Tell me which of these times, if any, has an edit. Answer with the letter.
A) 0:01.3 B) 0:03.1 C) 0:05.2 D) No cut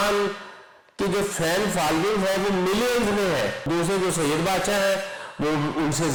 D